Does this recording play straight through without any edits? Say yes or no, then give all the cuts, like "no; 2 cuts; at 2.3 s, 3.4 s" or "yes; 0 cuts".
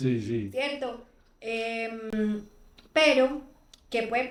yes; 0 cuts